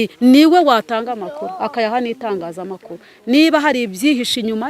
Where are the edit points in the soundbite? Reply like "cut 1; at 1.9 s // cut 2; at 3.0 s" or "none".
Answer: none